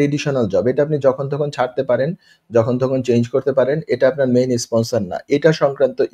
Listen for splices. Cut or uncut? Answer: uncut